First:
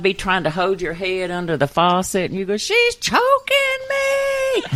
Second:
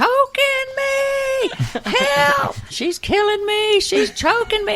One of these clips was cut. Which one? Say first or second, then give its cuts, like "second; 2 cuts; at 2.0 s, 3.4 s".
second; 1 cut; at 2.7 s